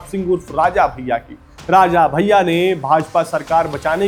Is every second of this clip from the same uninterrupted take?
yes; 0 cuts

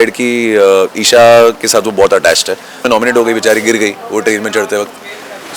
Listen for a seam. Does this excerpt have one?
yes; 1 cut; at 2.8 s

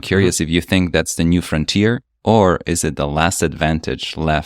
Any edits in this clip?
yes; 1 cut; at 2.1 s

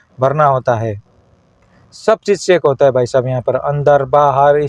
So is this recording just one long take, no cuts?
no; 1 cut; at 1.8 s

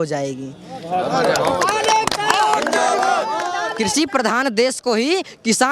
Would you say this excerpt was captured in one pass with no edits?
no; 1 cut; at 3.6 s

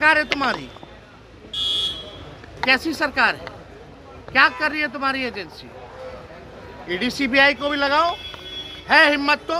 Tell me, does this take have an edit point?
no; 0 cuts

